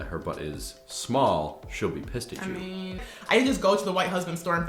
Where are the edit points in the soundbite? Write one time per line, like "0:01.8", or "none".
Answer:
0:03.1